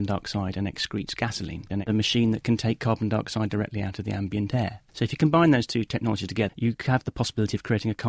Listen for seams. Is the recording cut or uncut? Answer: cut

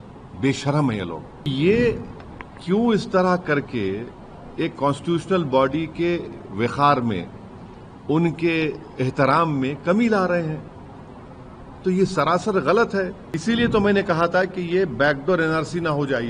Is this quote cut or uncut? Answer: cut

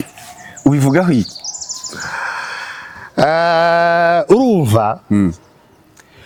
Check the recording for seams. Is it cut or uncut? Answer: uncut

